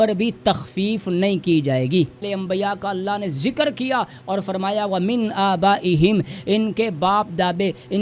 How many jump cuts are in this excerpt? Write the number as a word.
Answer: one